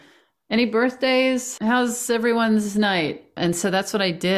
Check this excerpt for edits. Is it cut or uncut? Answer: cut